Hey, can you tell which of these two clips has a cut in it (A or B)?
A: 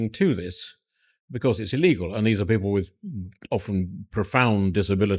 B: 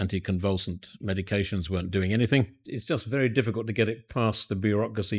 B